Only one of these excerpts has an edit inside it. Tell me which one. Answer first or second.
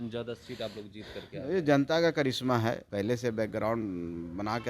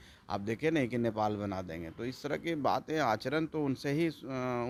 first